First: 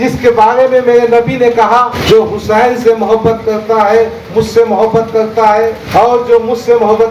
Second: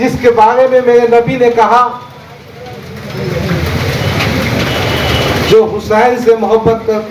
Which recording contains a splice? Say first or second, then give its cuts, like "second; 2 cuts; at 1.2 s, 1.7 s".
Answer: first; 2 cuts; at 2.0 s, 5.8 s